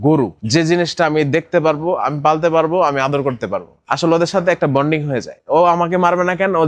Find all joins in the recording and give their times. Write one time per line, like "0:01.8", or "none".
0:05.3